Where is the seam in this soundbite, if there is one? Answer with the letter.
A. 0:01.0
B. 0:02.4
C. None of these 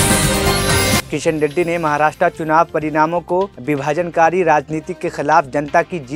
A